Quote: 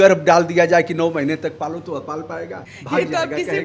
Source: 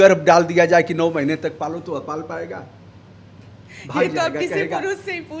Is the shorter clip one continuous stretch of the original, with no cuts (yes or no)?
no